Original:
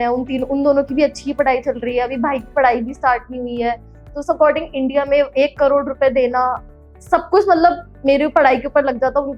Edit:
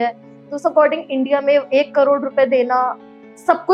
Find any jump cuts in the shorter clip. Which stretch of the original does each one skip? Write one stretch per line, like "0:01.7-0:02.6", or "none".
none

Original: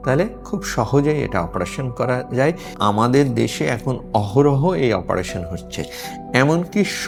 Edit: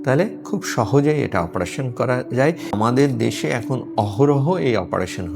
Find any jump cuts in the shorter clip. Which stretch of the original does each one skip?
0:02.8-0:02.9

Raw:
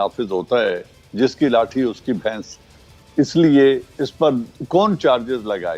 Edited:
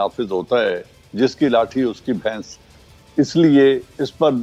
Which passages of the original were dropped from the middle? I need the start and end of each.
none

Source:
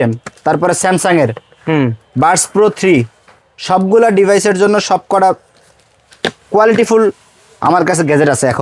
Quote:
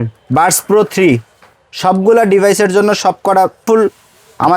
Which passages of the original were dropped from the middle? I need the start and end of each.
0:05.5-0:06.9

